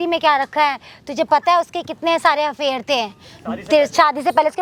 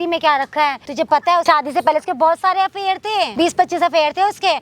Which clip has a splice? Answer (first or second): second